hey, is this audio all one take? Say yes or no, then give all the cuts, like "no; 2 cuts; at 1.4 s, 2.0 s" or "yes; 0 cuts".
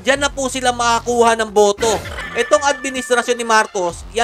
no; 1 cut; at 2.2 s